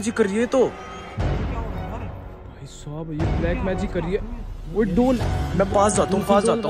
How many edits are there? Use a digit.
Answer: 0